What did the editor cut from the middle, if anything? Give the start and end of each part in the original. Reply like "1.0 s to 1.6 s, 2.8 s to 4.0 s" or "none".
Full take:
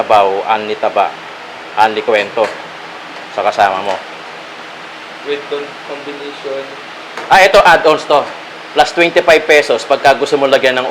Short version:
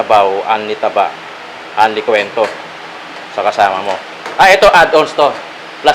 4.2 s to 7.1 s